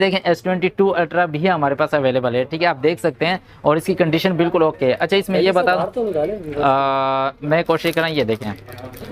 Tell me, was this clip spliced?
no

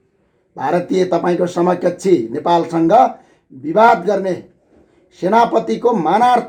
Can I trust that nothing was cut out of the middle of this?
yes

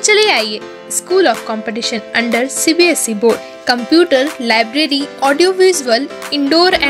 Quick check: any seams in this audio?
no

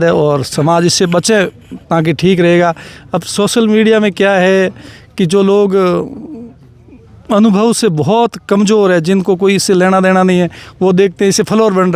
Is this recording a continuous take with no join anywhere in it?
yes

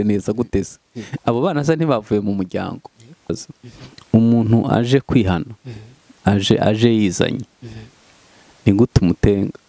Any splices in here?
yes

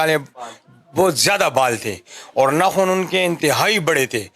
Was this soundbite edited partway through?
no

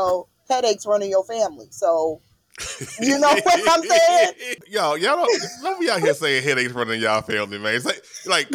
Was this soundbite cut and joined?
yes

